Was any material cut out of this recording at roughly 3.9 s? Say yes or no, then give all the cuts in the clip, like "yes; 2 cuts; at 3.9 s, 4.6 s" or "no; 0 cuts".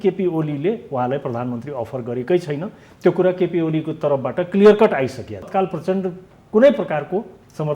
no; 1 cut; at 5.5 s